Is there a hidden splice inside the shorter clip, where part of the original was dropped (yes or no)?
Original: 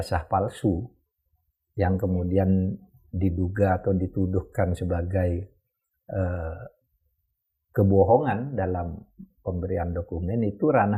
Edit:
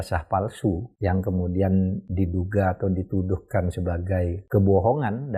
yes